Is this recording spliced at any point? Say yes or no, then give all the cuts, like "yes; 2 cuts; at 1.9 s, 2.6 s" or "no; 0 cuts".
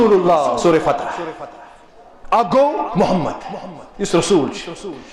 no; 0 cuts